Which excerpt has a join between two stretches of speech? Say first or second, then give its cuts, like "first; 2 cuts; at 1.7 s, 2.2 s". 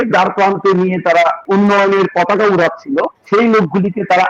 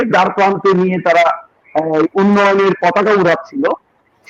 first; 2 cuts; at 1.4 s, 3.2 s